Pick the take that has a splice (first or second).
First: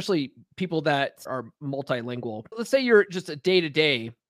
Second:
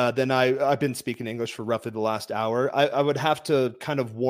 first